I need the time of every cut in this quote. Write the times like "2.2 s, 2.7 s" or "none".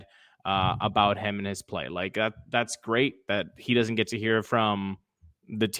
none

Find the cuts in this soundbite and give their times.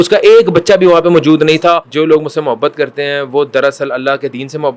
1.9 s

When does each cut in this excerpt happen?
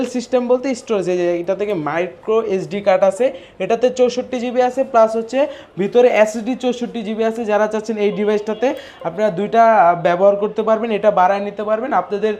none

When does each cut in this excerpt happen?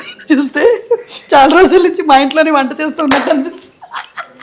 none

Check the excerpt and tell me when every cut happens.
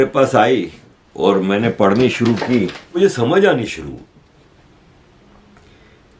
3.0 s

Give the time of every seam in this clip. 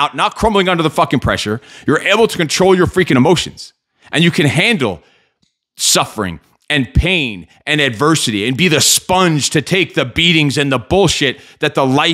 none

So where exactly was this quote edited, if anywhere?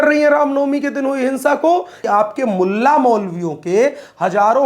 2.0 s

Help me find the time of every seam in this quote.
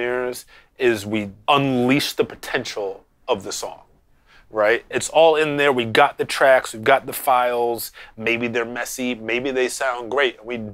1.3 s

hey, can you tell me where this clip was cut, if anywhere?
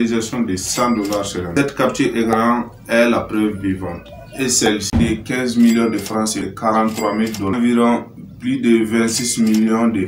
1.4 s, 4.9 s, 6.5 s

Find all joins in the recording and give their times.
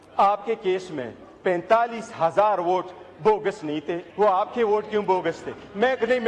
4.1 s

